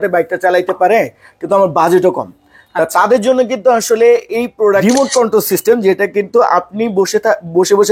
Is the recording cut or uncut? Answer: cut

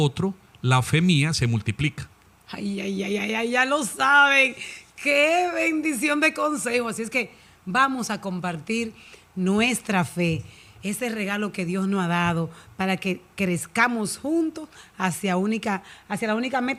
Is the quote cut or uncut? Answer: uncut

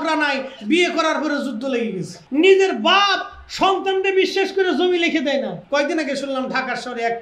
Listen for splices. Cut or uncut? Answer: cut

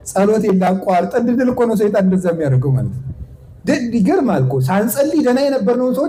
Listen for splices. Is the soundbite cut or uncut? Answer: uncut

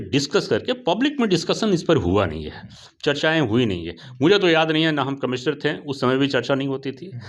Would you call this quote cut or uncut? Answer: uncut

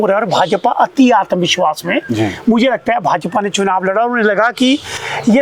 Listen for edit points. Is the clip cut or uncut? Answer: uncut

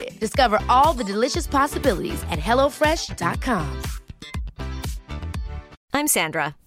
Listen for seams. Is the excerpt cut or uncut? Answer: cut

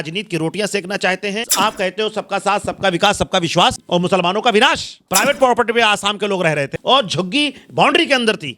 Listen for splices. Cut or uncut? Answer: cut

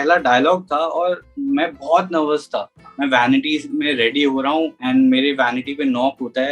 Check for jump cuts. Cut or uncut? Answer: cut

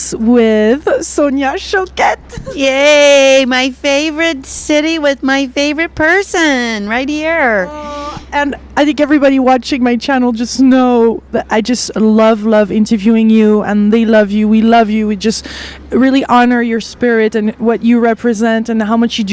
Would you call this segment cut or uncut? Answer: uncut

